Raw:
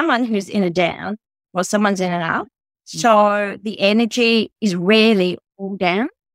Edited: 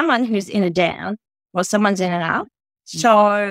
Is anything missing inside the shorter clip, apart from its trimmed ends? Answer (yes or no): no